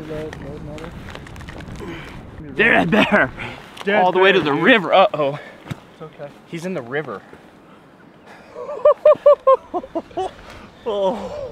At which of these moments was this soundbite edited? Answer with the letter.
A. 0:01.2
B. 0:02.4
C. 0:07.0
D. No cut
B